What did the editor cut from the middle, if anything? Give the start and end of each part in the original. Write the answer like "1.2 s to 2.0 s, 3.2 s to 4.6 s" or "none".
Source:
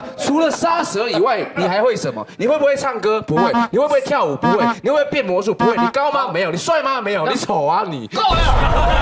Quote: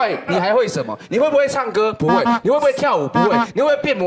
none